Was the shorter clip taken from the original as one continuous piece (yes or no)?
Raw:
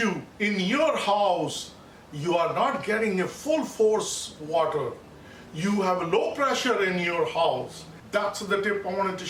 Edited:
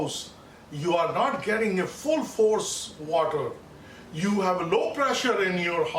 yes